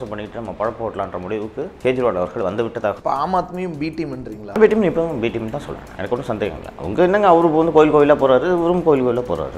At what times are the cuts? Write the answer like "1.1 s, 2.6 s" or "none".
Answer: 1.7 s, 5.8 s